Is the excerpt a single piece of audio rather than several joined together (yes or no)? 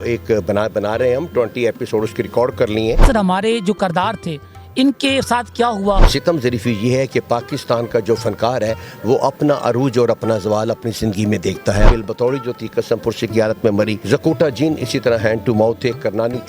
no